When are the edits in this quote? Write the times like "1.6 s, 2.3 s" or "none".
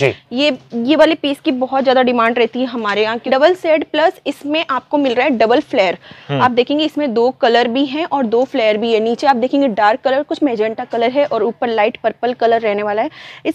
3.2 s